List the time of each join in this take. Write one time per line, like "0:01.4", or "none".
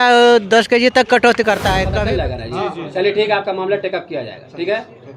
0:01.9